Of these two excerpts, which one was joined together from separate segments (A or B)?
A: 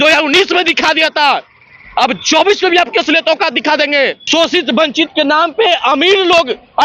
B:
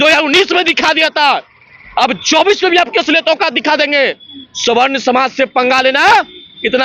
A